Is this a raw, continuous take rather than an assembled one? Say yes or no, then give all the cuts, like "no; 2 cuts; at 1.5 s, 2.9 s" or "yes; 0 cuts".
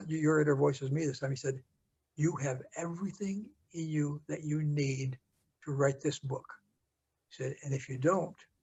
yes; 0 cuts